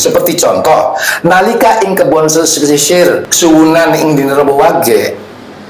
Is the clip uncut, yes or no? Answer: no